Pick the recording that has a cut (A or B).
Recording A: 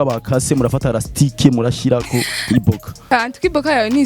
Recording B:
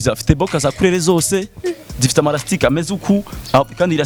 A